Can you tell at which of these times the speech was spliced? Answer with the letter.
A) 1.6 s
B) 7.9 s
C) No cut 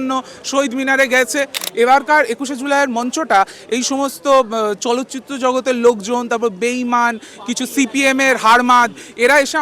A